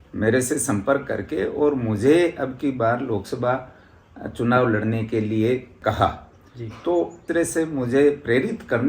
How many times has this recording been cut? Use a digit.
2